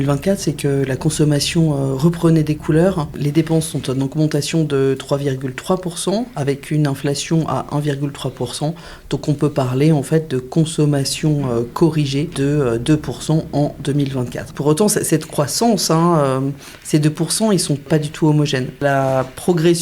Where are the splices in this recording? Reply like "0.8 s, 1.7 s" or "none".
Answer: 3.1 s, 12.3 s, 14.5 s, 17.8 s, 18.8 s